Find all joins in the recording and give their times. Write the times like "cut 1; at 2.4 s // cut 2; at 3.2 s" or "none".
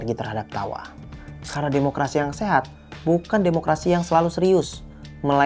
none